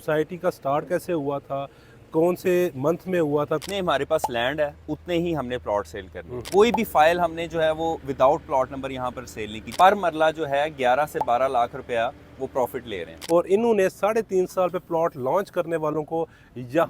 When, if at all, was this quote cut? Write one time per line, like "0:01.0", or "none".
0:03.6
0:06.4
0:09.7
0:13.1